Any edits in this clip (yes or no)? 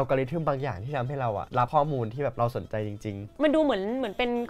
yes